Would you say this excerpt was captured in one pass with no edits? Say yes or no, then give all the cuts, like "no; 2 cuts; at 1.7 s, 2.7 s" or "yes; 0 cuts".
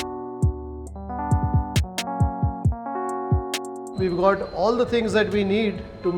yes; 0 cuts